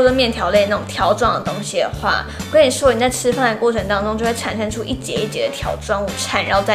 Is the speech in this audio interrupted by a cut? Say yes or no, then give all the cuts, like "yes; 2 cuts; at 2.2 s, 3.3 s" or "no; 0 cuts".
no; 0 cuts